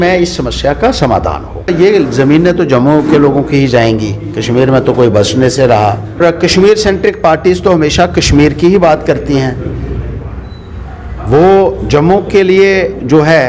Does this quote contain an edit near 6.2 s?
yes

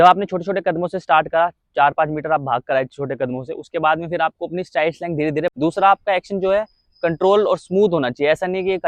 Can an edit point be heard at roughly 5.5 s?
yes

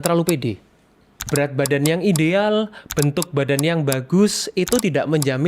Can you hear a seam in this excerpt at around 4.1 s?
no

